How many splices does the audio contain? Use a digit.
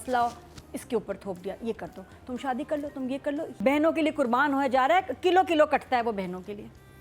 1